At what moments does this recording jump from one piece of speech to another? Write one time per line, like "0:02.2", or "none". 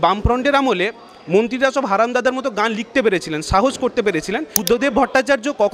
0:04.5